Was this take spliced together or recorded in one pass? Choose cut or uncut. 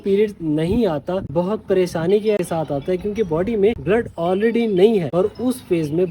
cut